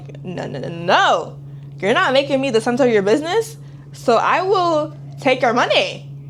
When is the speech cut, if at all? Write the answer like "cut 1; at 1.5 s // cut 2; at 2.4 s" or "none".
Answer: none